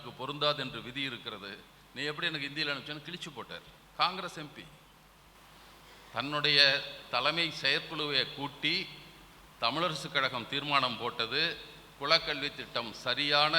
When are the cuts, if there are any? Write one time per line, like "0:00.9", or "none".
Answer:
0:05.4